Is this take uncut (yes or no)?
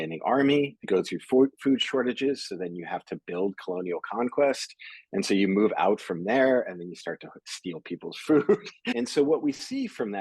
no